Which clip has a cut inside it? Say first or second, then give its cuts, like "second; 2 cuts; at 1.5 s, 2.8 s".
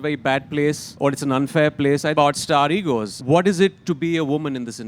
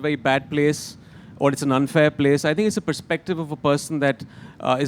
first; 3 cuts; at 0.9 s, 2.1 s, 3.2 s